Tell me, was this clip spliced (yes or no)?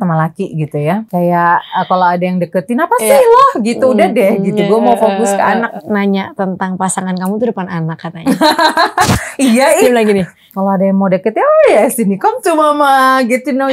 yes